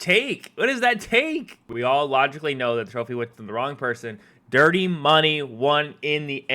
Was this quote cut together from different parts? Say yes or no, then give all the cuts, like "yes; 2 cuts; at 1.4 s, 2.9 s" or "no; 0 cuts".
yes; 1 cut; at 1.6 s